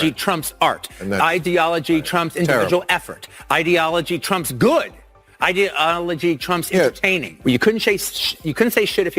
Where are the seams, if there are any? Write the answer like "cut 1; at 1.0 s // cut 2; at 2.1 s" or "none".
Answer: cut 1; at 7.3 s